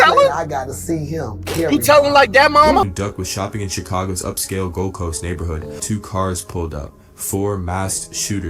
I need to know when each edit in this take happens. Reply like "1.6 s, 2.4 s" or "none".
2.8 s, 5.8 s